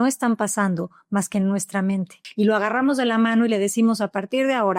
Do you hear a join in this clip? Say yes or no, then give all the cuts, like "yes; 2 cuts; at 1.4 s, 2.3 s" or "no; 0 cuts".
yes; 1 cut; at 2.2 s